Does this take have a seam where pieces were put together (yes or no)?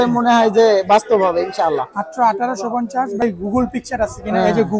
yes